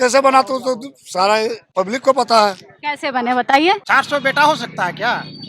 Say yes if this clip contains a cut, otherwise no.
yes